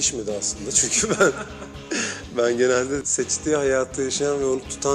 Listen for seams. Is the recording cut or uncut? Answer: uncut